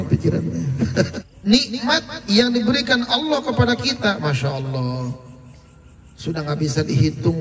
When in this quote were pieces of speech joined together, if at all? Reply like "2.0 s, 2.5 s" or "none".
1.2 s